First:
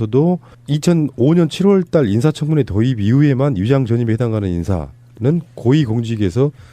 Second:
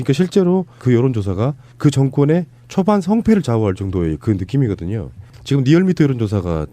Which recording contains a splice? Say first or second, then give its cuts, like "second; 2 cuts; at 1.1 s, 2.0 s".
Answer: first; 1 cut; at 3.5 s